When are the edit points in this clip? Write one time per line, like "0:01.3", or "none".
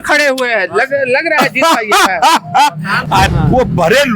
0:03.3